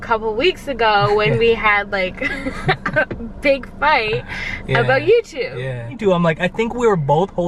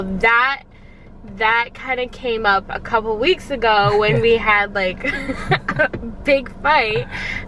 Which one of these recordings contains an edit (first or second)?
first